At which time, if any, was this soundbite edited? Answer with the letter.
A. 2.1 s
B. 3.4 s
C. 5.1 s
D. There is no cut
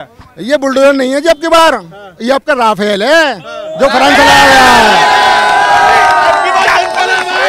D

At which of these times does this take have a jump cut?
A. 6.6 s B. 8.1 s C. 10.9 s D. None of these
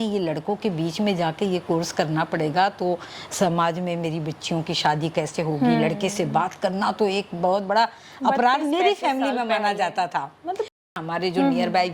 C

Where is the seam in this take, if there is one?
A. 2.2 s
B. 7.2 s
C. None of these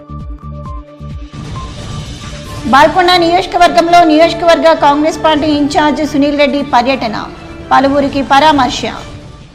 A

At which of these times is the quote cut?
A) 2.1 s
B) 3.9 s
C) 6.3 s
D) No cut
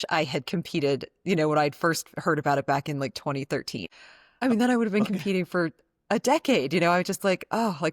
B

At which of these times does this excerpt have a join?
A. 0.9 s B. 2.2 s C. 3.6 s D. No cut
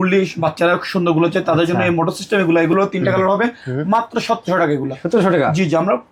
D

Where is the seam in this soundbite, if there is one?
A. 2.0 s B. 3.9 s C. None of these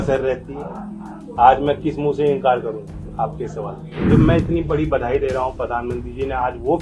B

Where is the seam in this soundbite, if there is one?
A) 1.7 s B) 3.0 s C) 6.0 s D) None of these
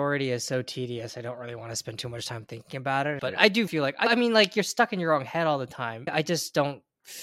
C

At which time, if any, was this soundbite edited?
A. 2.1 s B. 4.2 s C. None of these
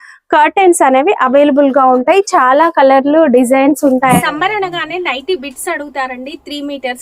B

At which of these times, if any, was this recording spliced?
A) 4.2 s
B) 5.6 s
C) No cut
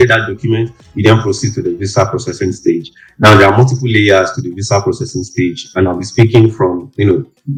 C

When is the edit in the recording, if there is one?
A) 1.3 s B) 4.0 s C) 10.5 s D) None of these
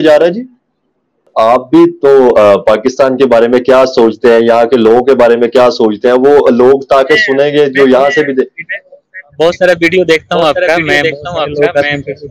A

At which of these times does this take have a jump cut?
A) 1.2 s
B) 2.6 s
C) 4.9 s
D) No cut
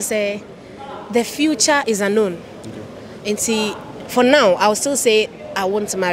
D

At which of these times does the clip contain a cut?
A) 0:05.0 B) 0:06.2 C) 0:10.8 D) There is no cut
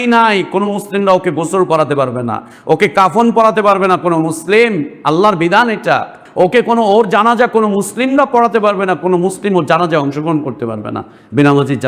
B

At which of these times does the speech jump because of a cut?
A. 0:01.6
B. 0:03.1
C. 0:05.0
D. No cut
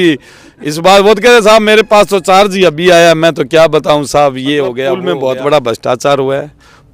C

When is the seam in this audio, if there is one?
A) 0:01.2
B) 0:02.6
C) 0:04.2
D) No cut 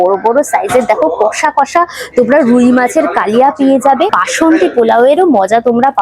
C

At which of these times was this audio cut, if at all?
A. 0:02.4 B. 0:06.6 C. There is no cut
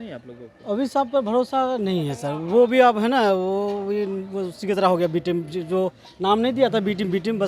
C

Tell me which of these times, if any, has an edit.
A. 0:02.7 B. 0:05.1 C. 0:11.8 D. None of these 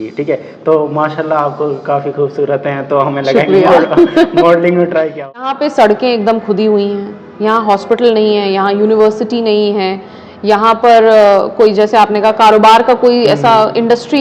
B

